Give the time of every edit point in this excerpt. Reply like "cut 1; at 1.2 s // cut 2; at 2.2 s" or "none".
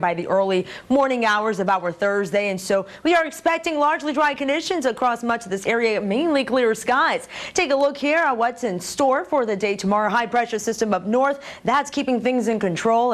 cut 1; at 5.8 s